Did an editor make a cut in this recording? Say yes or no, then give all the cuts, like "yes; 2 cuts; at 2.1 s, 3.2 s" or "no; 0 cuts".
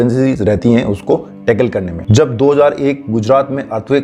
no; 0 cuts